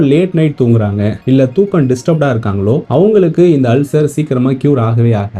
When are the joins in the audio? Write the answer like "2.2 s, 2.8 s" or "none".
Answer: 1.2 s, 2.8 s